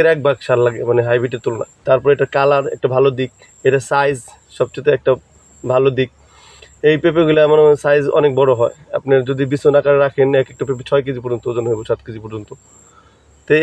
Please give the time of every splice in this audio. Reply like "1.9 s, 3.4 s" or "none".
1.8 s